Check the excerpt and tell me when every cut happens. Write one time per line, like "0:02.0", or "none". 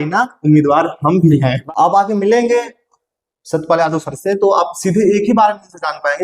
0:01.6